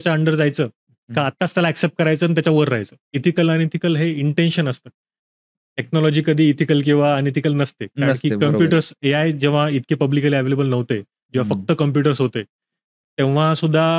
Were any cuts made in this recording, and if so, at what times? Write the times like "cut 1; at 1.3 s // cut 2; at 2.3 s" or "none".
cut 1; at 3.1 s